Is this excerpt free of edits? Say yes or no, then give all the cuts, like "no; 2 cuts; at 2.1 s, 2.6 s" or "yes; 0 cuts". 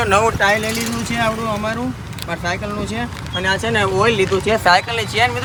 yes; 0 cuts